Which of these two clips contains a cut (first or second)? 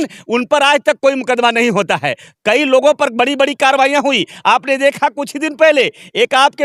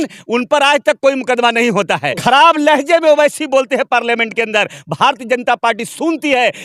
second